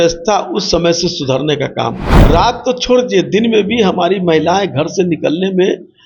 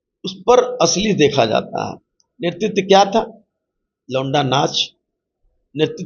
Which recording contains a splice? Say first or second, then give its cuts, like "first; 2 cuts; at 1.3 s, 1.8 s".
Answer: first; 1 cut; at 2.1 s